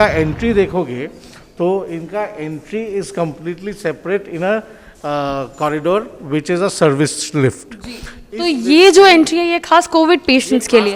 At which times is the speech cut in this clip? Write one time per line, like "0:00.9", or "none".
none